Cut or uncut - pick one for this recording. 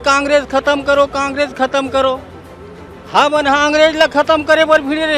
uncut